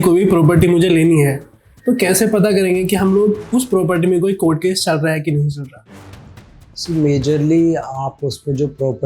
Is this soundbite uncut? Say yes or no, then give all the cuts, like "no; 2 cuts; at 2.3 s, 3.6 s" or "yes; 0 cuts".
yes; 0 cuts